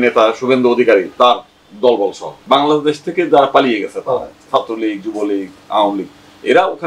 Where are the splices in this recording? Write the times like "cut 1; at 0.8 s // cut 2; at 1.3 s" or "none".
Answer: cut 1; at 2.4 s